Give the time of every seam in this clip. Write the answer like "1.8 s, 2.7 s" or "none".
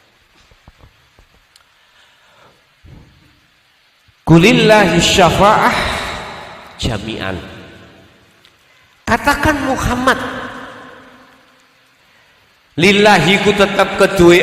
none